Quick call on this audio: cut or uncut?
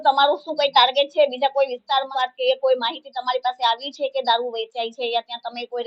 cut